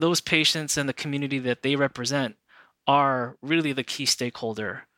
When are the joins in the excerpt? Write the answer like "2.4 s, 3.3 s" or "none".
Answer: none

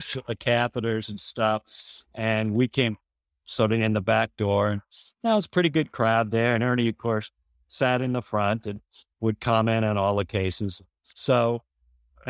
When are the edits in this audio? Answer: 11.2 s

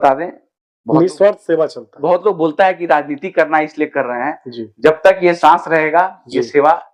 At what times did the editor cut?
none

